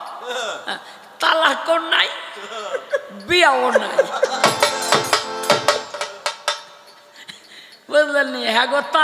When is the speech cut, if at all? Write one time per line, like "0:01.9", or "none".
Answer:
none